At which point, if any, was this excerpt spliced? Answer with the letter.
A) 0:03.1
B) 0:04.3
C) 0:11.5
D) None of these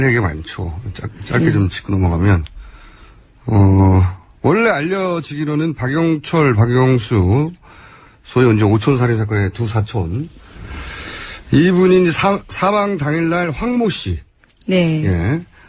C